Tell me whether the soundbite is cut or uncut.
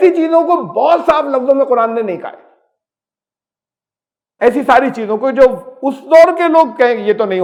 uncut